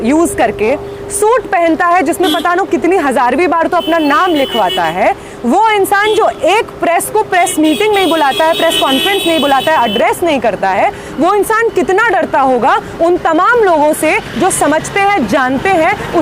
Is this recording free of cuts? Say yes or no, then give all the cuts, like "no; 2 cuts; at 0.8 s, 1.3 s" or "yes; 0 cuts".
yes; 0 cuts